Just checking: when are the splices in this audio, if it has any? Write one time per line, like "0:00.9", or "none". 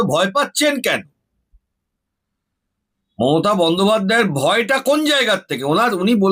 none